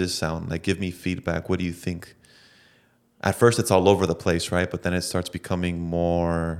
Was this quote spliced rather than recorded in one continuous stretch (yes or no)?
no